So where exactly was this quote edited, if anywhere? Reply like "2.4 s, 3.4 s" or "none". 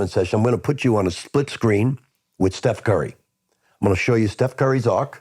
none